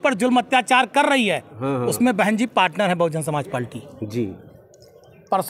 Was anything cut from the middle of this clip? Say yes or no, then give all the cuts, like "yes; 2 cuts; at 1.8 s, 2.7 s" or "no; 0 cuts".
no; 0 cuts